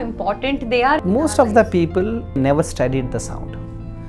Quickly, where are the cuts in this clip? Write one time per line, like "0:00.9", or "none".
0:01.0
0:02.4